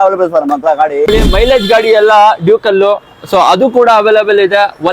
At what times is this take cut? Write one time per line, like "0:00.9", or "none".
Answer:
0:01.1